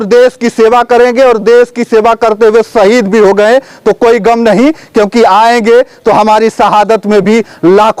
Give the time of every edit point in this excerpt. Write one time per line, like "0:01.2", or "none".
none